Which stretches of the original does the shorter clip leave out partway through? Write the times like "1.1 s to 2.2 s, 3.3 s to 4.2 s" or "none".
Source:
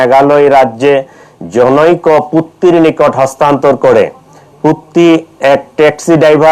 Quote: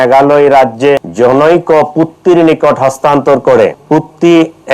1.1 s to 1.4 s, 4.2 s to 4.5 s